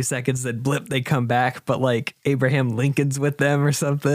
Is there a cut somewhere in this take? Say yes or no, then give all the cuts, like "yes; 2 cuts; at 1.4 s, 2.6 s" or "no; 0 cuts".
yes; 1 cut; at 2.1 s